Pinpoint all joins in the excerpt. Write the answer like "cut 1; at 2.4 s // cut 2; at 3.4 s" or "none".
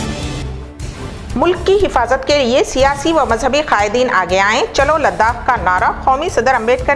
cut 1; at 1.0 s